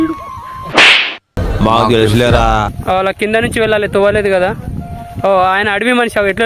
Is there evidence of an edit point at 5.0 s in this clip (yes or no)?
no